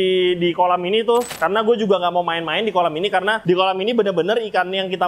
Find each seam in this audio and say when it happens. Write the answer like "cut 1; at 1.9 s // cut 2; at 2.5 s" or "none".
cut 1; at 1.3 s // cut 2; at 3.4 s